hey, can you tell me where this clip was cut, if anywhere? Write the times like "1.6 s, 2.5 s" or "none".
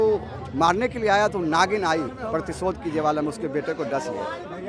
none